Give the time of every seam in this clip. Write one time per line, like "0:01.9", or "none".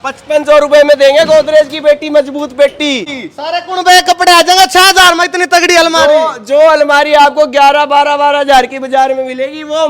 0:03.2